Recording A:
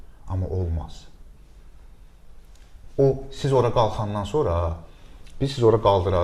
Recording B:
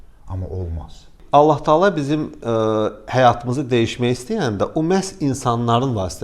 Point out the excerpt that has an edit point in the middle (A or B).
B